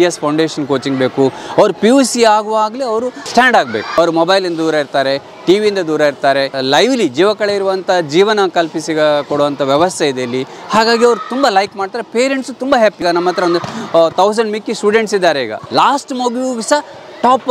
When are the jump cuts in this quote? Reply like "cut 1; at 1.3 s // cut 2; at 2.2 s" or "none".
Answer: cut 1; at 3.2 s // cut 2; at 3.9 s // cut 3; at 6.6 s // cut 4; at 13.0 s // cut 5; at 15.6 s